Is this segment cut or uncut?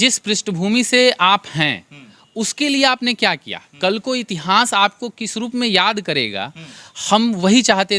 uncut